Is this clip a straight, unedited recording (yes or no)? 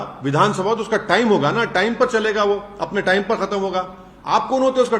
yes